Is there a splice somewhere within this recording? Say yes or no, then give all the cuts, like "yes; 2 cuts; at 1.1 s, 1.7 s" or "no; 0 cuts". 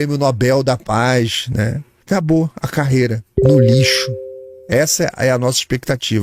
yes; 1 cut; at 1.9 s